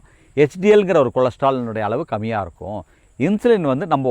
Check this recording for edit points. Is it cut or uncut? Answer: cut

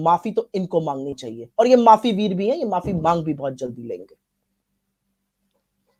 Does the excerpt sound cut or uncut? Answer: uncut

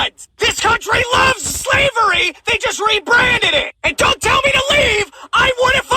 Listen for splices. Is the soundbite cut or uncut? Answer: cut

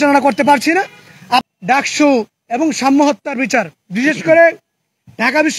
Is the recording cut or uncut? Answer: cut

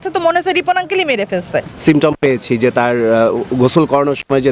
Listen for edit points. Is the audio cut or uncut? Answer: cut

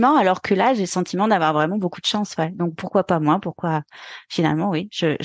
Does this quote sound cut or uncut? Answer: uncut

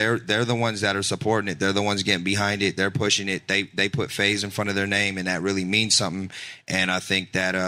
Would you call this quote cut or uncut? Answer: uncut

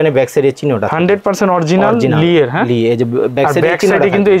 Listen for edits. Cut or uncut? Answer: uncut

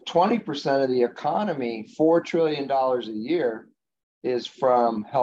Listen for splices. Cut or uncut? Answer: uncut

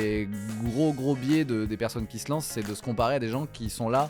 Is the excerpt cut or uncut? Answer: uncut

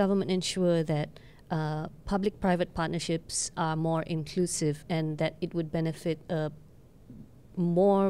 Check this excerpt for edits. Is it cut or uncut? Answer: uncut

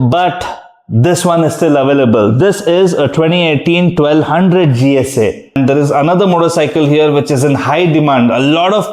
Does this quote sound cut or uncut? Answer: cut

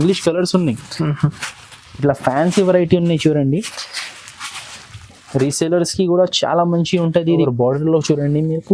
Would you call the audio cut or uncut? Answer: cut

